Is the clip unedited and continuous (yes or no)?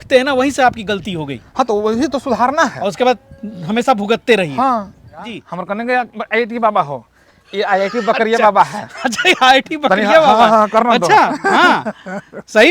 no